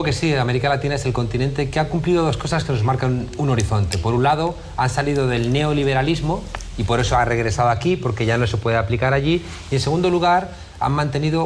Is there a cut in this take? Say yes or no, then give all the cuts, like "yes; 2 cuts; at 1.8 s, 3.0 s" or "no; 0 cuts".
yes; 1 cut; at 4.8 s